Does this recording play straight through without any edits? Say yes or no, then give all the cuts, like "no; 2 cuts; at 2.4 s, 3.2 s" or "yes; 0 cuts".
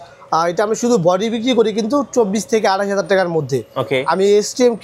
yes; 0 cuts